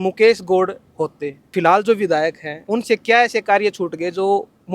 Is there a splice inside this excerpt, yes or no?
yes